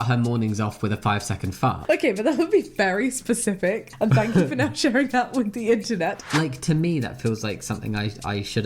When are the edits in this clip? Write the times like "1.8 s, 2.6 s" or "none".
6.3 s